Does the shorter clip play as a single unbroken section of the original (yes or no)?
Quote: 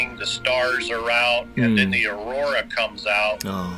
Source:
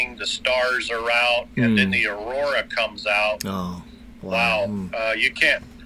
yes